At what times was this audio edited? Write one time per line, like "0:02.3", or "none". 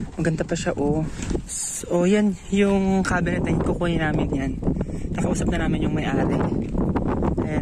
0:01.2